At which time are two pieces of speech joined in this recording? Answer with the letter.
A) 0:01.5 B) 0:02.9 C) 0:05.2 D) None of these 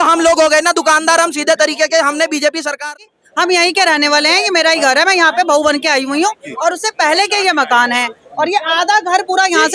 B